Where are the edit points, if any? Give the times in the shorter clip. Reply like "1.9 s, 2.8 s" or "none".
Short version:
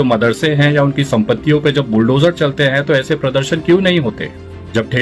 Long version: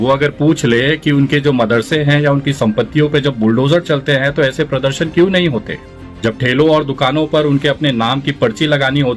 none